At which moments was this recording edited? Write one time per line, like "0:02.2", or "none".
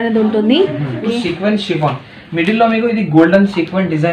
0:01.0